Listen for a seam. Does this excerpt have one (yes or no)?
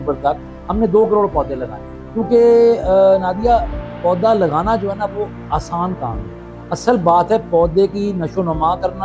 no